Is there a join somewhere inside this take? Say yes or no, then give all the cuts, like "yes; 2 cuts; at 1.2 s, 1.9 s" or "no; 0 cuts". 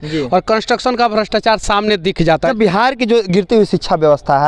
yes; 1 cut; at 2.4 s